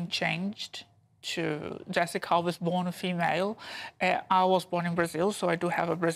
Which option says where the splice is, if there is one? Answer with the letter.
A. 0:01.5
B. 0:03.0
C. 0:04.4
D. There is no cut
B